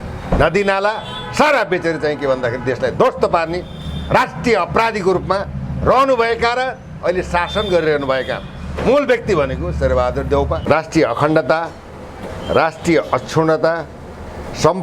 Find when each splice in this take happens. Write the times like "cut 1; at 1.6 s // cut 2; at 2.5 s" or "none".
cut 1; at 10.6 s